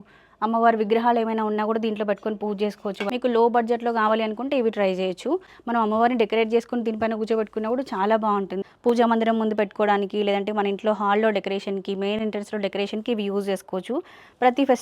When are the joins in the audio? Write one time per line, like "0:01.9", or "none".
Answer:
0:03.1
0:05.5
0:08.6